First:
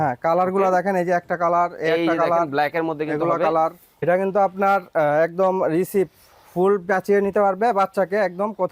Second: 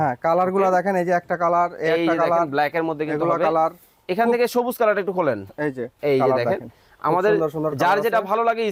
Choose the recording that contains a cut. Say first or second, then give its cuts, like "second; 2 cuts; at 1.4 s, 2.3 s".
first; 1 cut; at 3.9 s